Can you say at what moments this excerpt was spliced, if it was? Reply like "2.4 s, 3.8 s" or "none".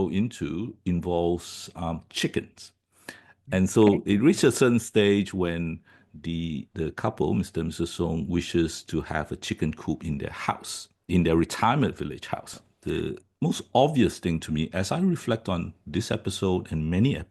12.6 s